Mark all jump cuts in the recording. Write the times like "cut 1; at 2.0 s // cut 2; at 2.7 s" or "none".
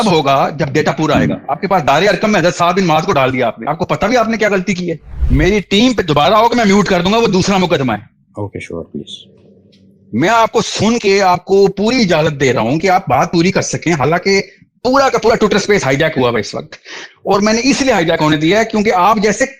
cut 1; at 5.1 s